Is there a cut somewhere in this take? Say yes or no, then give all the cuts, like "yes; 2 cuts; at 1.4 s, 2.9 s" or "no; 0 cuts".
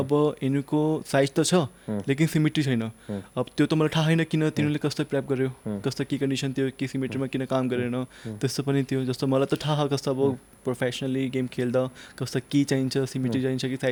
no; 0 cuts